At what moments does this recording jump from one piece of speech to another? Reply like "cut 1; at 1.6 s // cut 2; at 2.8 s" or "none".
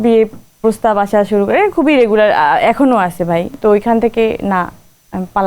cut 1; at 3.5 s